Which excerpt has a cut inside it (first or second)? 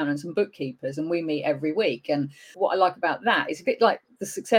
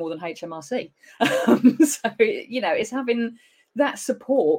first